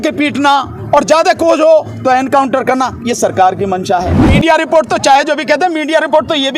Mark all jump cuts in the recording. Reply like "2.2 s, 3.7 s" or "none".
4.2 s